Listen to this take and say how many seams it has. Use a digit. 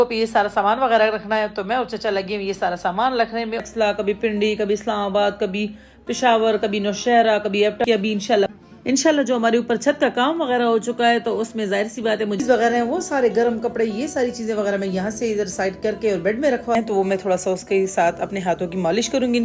4